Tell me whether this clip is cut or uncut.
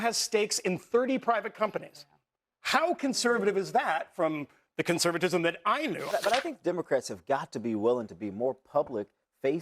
cut